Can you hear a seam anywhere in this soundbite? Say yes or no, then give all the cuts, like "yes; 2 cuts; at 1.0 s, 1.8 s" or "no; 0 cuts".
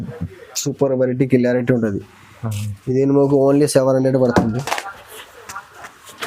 no; 0 cuts